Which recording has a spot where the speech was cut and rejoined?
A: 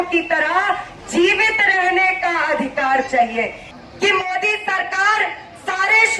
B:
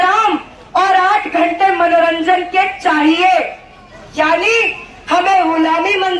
A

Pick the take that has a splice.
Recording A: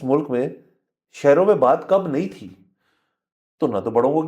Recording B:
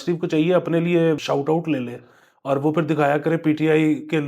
B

